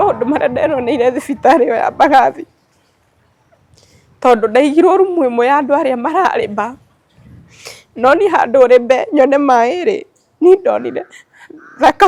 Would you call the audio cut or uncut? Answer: uncut